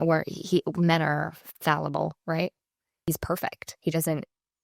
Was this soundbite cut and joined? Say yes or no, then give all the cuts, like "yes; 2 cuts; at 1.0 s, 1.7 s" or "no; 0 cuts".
yes; 1 cut; at 3.0 s